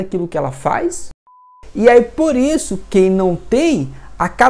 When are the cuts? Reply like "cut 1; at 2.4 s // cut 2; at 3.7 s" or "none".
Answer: cut 1; at 1.4 s